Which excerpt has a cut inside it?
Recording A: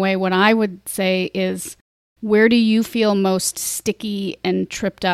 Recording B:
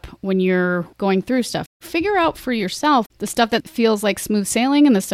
B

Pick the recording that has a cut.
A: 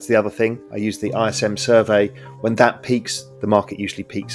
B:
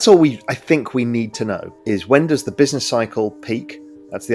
B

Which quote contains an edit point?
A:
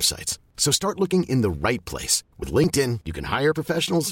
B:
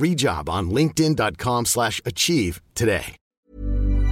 B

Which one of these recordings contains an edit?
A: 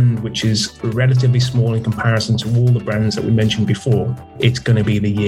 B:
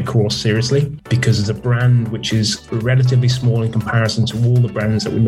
A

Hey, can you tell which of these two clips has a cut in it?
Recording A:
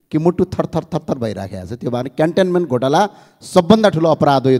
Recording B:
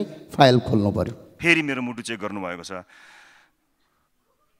B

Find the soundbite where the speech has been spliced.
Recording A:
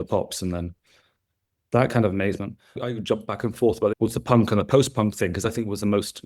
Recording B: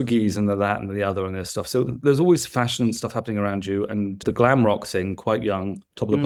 A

